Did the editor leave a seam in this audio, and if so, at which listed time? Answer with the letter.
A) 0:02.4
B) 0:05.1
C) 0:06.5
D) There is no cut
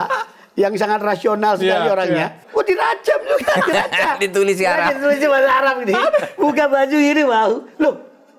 A